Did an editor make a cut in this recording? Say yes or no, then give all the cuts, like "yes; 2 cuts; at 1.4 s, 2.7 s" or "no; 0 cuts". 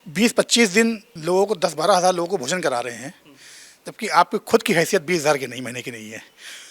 yes; 1 cut; at 1.1 s